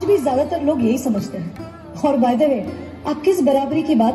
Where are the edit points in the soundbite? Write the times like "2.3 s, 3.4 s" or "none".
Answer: none